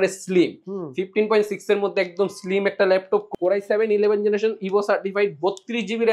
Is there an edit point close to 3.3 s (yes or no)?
yes